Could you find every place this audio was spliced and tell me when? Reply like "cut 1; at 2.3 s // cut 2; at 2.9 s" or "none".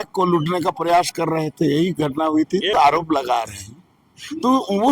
cut 1; at 2.7 s